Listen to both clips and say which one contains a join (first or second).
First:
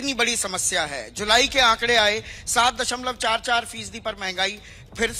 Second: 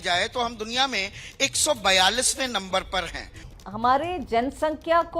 second